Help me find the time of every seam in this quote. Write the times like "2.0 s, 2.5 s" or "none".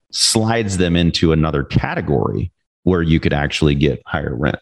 none